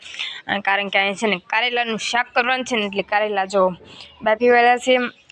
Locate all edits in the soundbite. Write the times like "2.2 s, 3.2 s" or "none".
none